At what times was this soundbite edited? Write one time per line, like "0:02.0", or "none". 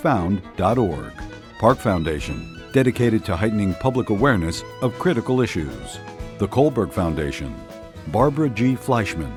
none